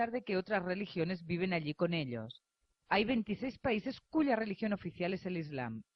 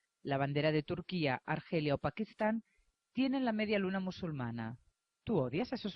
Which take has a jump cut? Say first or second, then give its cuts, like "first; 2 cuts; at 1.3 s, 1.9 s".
second; 1 cut; at 3.1 s